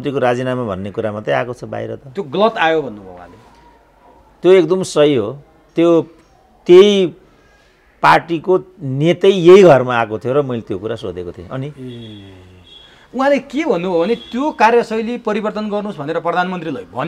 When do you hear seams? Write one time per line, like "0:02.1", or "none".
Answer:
none